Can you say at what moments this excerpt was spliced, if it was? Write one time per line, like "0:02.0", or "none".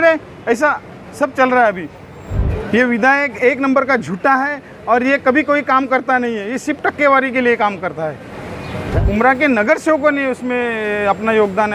0:02.3
0:08.7